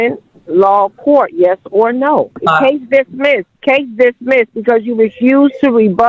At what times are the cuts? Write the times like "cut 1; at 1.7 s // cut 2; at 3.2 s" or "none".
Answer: cut 1; at 2.4 s // cut 2; at 3.5 s

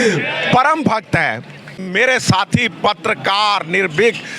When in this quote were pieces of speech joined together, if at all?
cut 1; at 1.9 s

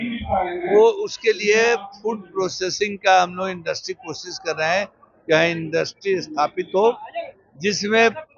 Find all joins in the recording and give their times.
none

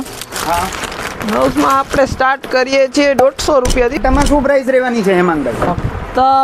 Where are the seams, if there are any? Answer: cut 1; at 4.0 s

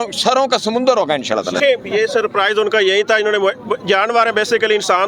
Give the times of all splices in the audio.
none

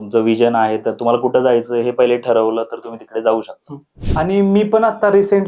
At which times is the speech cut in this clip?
cut 1; at 4.0 s

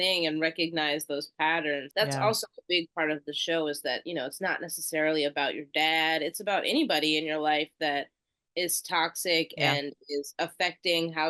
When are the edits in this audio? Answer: cut 1; at 1.9 s

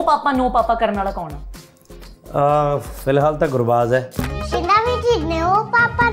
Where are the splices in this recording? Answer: none

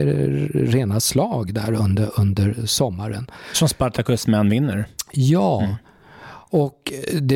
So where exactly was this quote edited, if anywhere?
none

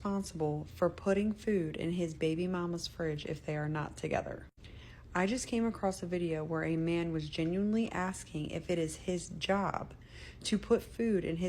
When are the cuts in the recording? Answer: cut 1; at 5.4 s

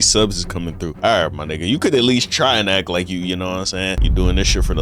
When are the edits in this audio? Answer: cut 1; at 1.0 s // cut 2; at 4.0 s

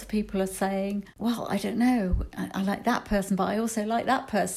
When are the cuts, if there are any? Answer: cut 1; at 1.1 s

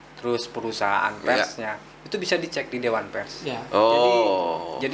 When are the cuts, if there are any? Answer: none

